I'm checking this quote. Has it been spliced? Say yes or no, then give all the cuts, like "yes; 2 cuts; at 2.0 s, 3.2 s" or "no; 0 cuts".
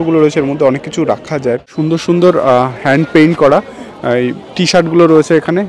yes; 1 cut; at 1.6 s